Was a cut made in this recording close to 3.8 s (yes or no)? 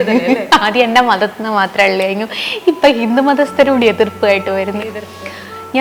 no